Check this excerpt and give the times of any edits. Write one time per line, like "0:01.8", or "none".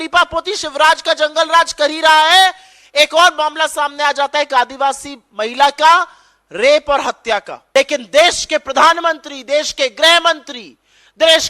0:07.5